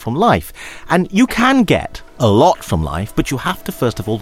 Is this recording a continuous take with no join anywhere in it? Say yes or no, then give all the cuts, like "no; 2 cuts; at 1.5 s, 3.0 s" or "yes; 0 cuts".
no; 1 cut; at 2.0 s